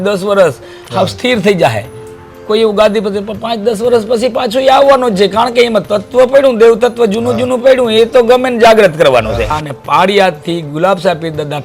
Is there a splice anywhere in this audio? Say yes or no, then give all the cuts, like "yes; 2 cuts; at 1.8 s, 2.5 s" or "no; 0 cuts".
yes; 1 cut; at 9.6 s